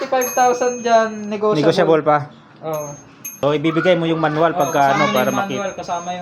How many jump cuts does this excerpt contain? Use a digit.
1